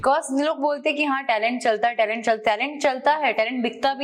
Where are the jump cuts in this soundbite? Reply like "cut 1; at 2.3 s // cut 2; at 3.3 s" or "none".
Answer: none